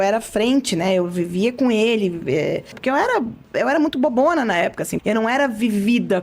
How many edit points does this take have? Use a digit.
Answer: 2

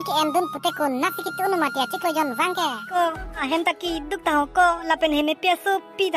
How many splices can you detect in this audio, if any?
1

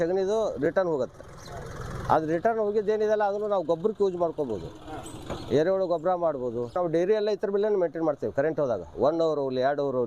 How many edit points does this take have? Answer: 1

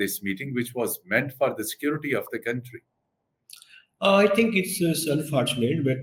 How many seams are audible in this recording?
0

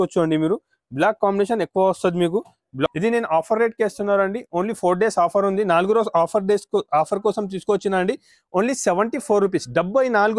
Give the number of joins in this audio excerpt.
1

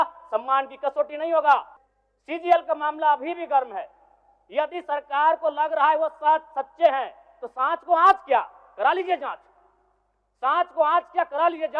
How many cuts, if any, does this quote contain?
1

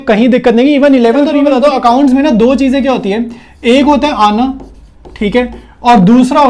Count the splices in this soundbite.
1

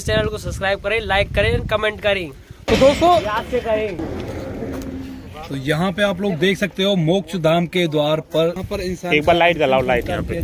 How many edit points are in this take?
2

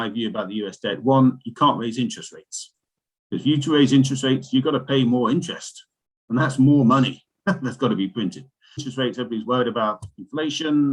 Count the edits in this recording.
1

